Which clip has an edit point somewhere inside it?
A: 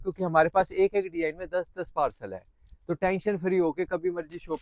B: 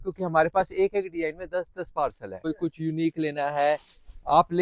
B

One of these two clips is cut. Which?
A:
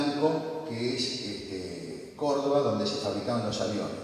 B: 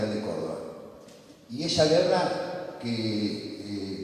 B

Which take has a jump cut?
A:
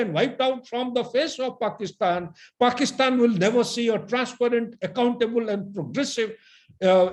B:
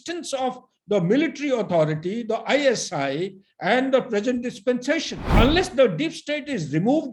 B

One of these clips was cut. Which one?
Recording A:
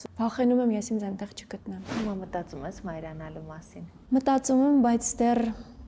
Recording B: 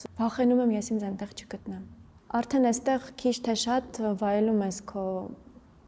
A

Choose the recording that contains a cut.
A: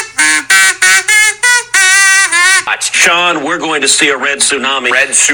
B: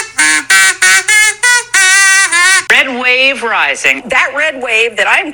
B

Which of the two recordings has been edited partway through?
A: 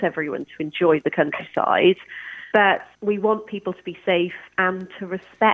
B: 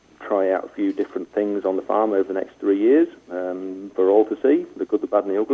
A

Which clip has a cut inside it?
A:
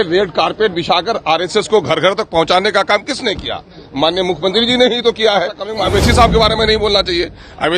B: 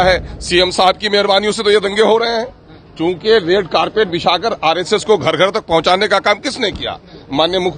A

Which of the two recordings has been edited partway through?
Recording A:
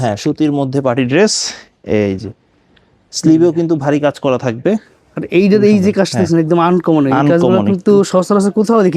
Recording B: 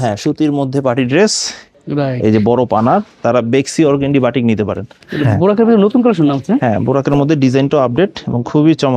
B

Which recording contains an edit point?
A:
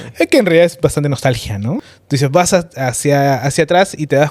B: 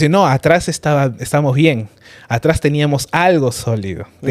A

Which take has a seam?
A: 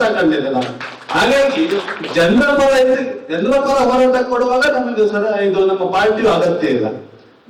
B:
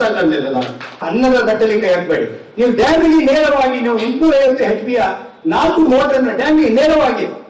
B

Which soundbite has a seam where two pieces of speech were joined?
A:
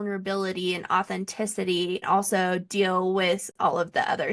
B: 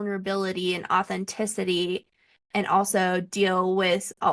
A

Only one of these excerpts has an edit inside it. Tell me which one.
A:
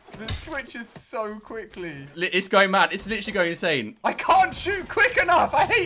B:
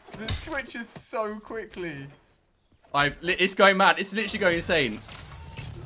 A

